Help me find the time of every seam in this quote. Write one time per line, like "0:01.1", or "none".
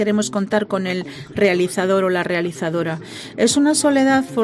none